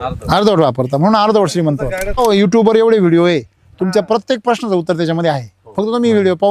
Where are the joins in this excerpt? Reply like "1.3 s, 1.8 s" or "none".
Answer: 2.2 s